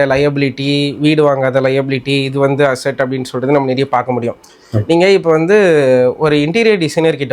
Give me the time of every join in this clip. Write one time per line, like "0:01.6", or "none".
none